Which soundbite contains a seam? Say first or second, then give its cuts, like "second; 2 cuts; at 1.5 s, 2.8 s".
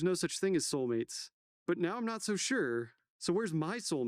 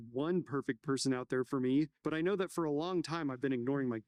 first; 1 cut; at 3.0 s